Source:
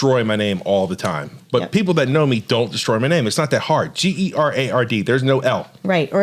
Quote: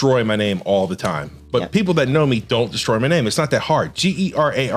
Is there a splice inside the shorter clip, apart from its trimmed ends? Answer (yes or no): no